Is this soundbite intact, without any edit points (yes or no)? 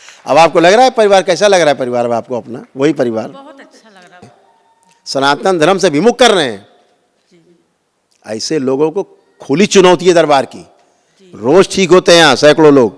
no